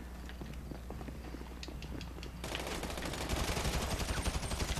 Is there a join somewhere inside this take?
no; 0 cuts

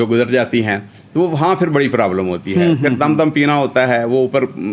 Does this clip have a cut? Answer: no; 0 cuts

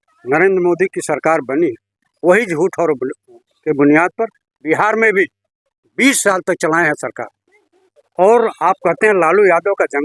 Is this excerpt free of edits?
yes; 0 cuts

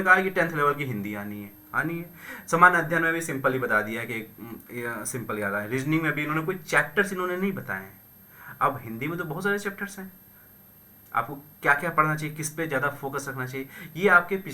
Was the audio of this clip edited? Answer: no; 0 cuts

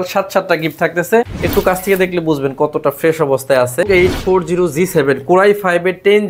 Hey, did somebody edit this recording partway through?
yes; 2 cuts; at 1.3 s, 3.9 s

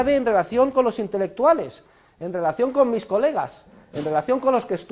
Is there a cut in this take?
no; 0 cuts

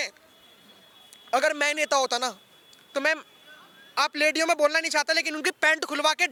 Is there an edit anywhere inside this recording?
no; 0 cuts

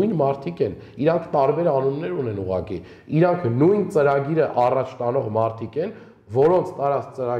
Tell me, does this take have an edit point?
no; 0 cuts

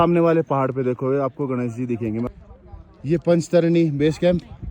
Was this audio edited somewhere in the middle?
yes; 1 cut; at 2.3 s

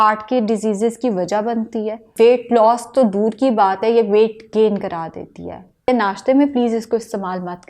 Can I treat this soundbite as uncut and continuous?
no; 2 cuts; at 2.1 s, 5.9 s

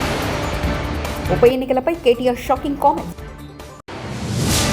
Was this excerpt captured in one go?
yes; 0 cuts

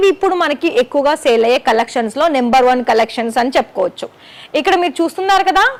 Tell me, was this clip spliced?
no; 0 cuts

